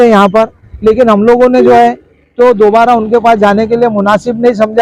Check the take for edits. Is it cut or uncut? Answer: uncut